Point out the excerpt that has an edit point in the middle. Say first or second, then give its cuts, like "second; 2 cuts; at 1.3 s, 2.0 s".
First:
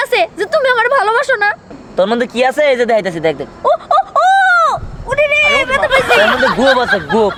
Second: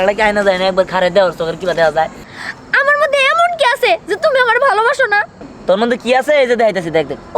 second; 1 cut; at 2.3 s